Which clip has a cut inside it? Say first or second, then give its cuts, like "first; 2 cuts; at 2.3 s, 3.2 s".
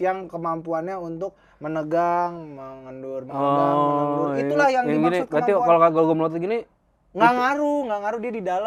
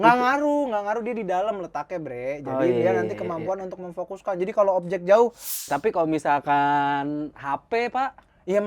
second; 1 cut; at 5.6 s